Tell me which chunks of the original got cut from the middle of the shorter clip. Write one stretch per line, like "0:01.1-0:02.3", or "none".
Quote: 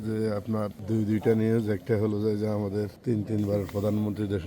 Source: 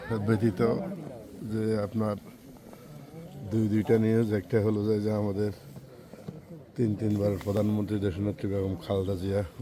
0:02.2-0:03.4
0:05.6-0:06.7